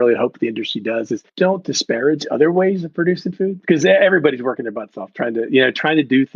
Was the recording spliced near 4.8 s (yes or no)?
no